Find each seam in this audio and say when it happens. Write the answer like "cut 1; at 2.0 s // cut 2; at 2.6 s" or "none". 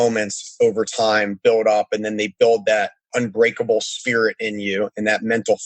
cut 1; at 3.1 s